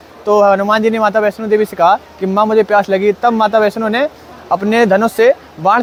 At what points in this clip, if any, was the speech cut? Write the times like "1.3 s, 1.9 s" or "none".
none